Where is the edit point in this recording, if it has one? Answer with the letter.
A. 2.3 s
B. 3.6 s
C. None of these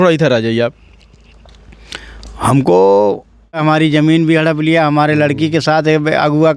B